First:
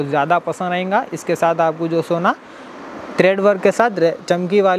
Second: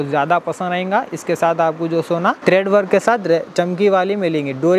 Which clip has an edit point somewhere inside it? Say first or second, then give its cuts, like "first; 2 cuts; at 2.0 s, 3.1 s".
second; 1 cut; at 2.4 s